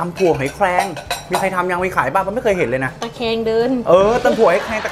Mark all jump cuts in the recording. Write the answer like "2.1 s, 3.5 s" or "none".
none